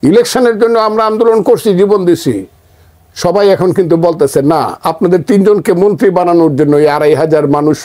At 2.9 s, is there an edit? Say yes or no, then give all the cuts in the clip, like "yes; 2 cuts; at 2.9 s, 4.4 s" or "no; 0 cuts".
no; 0 cuts